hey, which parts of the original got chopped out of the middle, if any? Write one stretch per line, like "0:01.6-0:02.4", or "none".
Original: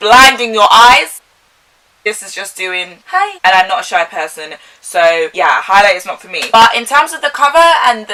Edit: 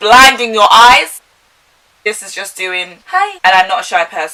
none